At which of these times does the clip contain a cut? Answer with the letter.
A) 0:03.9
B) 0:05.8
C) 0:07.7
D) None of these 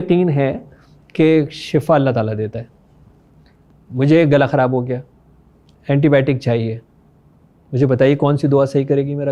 D